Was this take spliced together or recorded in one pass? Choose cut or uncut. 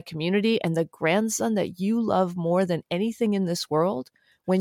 uncut